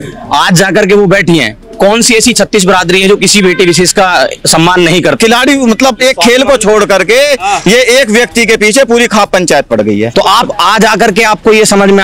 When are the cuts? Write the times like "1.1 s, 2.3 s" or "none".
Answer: 5.2 s, 10.1 s

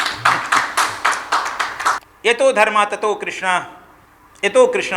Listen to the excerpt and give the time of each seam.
2.0 s

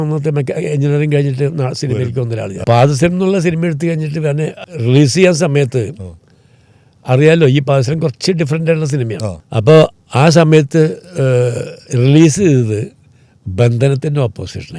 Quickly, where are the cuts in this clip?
2.6 s

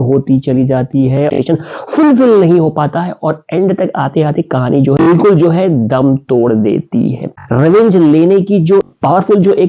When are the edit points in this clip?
1.4 s, 7.4 s

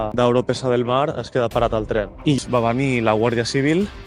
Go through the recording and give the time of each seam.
2.4 s

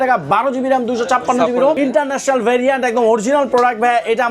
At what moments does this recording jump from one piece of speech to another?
1.8 s

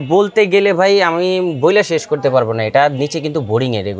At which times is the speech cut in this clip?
none

